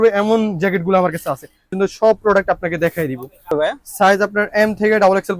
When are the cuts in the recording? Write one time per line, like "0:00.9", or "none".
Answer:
0:01.7
0:03.5